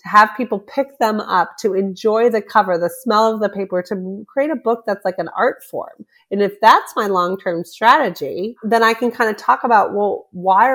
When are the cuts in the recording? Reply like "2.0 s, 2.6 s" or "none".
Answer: 8.6 s